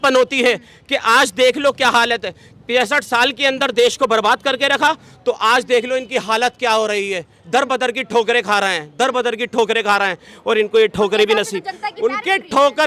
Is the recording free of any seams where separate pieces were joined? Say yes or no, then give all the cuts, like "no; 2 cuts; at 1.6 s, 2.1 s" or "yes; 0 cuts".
yes; 0 cuts